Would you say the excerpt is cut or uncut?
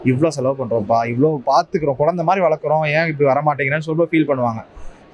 uncut